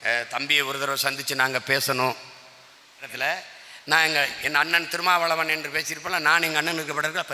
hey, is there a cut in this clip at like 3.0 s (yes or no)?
yes